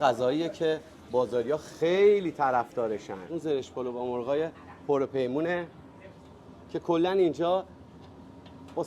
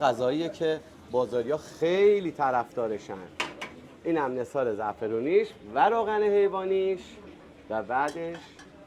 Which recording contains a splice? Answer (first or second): first